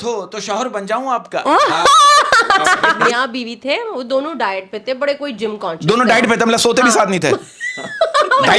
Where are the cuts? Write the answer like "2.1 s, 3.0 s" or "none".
3.0 s